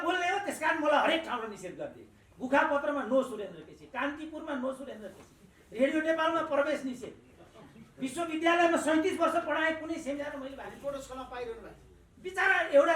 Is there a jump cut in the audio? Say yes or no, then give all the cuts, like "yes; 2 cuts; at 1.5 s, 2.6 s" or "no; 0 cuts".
no; 0 cuts